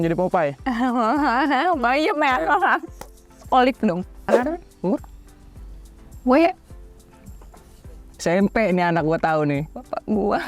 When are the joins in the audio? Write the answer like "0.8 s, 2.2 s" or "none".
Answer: 4.3 s